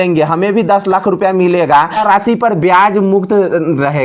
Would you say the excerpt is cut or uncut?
cut